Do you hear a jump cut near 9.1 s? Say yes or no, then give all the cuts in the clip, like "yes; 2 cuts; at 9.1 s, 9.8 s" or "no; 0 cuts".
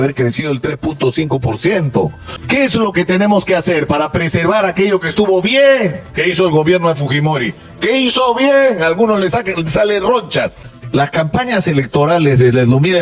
no; 2 cuts; at 2.3 s, 10.7 s